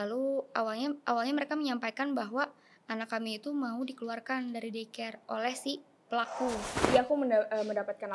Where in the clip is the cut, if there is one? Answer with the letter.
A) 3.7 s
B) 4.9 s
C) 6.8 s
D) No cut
C